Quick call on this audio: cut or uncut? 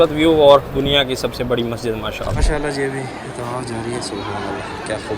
cut